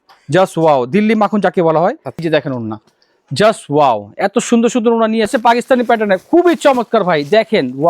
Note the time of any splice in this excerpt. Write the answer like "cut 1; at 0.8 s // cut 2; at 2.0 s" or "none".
cut 1; at 2.2 s // cut 2; at 5.3 s

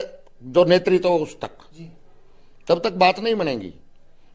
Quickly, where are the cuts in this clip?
none

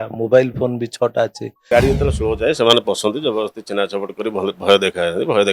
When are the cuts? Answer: cut 1; at 1.7 s

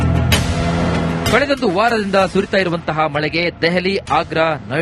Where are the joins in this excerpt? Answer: cut 1; at 1.0 s

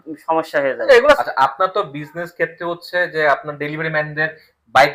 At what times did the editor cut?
cut 1; at 1.2 s

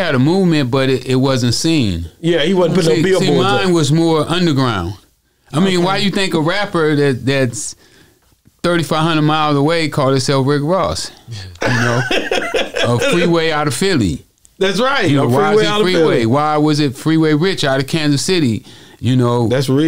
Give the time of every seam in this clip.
none

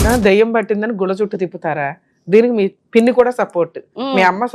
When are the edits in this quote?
cut 1; at 2.8 s

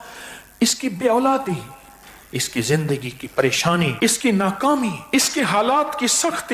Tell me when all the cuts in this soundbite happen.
cut 1; at 3.9 s // cut 2; at 5.0 s

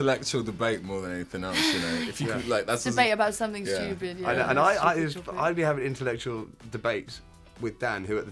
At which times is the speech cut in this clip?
none

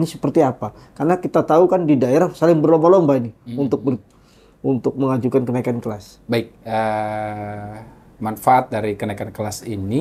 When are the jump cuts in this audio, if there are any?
none

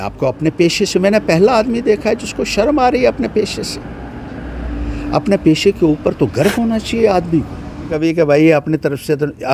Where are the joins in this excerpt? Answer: cut 1; at 7.9 s

